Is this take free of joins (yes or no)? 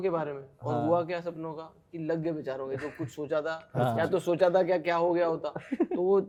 yes